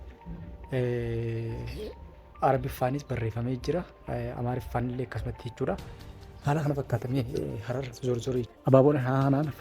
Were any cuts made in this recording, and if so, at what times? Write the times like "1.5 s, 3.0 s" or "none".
8.5 s

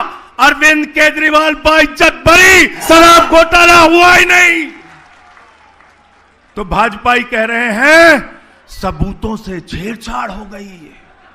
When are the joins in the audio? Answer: 2.8 s

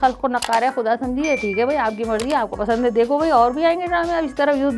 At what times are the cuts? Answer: none

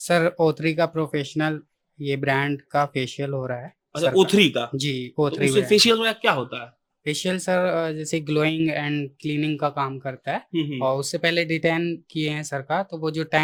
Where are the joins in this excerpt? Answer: none

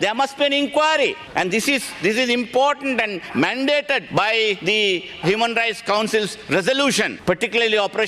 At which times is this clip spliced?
1.2 s, 4.4 s, 7.1 s

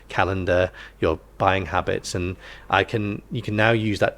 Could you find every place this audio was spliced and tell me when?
none

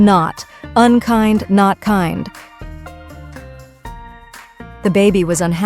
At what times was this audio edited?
2.4 s, 4.8 s

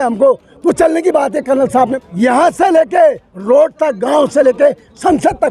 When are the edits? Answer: 1.9 s

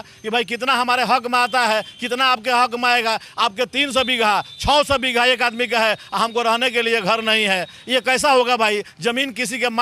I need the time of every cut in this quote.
none

